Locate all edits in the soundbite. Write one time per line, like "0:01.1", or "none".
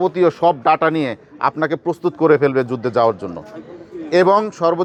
none